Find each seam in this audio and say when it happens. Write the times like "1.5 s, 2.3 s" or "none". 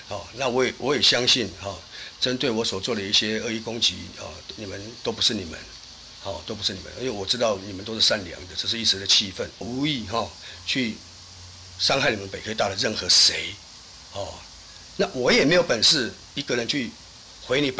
9.6 s